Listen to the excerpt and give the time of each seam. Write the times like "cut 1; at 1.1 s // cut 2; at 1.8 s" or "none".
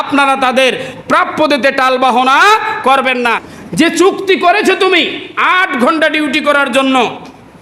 cut 1; at 3.5 s